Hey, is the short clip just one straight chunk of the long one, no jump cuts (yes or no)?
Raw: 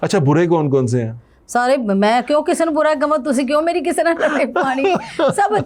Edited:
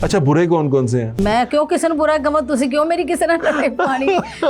no